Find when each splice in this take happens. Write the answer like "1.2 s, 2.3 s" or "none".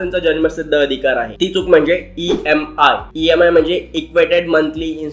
none